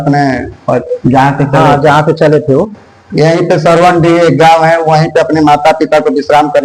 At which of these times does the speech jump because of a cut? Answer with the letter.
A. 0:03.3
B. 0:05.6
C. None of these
C